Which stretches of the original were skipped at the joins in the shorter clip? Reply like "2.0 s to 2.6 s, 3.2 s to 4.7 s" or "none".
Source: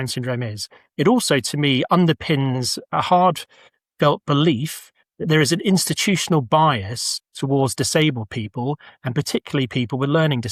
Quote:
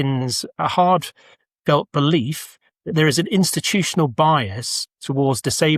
none